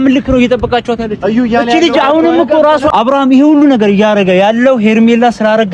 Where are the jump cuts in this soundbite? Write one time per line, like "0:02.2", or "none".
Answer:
0:02.9